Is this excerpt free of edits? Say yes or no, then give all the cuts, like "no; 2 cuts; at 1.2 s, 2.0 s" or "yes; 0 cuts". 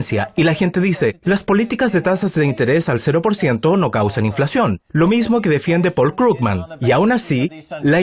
no; 1 cut; at 1.0 s